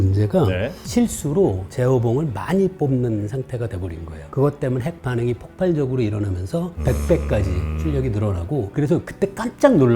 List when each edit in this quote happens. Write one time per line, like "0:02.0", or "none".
0:04.2
0:06.7
0:08.7